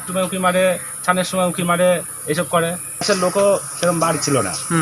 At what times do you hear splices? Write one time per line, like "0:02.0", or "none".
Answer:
0:03.0